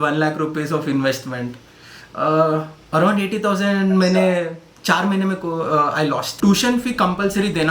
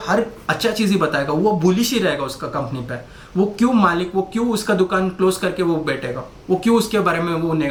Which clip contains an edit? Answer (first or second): first